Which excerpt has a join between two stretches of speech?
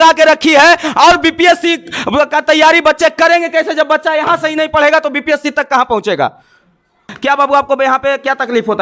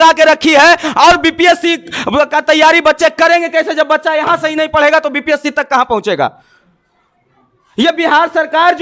first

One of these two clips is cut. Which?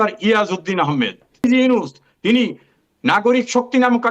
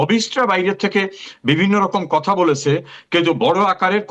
first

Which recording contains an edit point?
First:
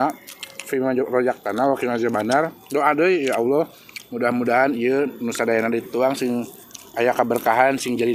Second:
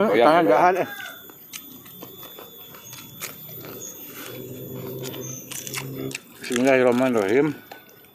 second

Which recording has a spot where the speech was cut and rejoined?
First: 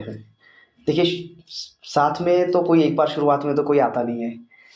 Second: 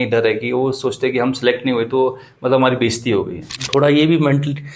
second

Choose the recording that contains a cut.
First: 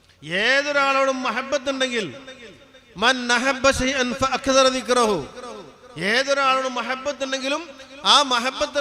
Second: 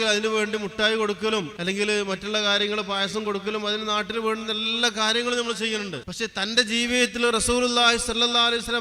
second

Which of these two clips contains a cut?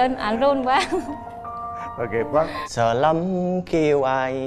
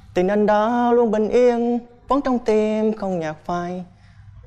first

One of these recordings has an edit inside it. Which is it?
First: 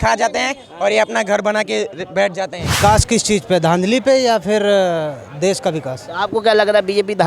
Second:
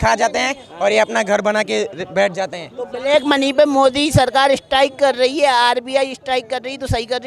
first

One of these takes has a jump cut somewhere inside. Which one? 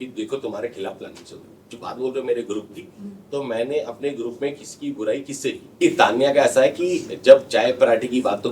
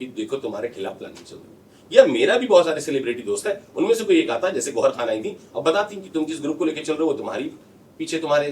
first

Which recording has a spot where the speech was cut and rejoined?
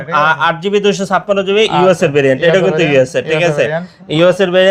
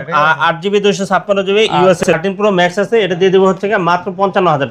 second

